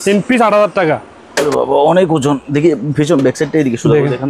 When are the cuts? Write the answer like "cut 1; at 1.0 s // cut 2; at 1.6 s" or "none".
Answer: cut 1; at 1.5 s